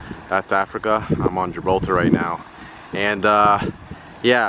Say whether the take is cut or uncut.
uncut